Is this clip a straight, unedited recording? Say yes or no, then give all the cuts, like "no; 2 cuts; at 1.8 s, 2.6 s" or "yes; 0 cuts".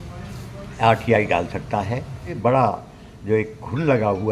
no; 1 cut; at 2.2 s